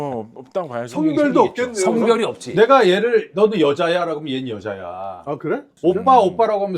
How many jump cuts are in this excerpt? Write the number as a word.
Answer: two